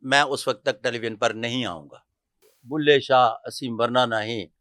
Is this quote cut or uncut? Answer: cut